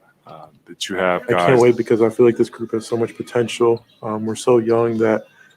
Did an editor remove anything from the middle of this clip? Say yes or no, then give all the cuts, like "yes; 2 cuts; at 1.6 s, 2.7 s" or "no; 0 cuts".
yes; 1 cut; at 1.4 s